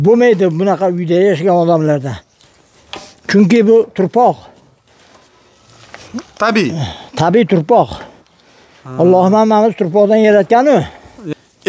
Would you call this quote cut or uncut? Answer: uncut